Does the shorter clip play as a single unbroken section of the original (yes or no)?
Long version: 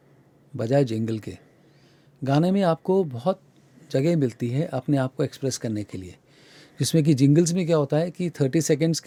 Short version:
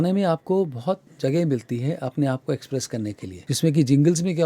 no